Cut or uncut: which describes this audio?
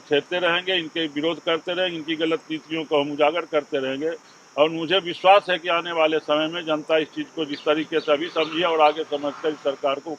uncut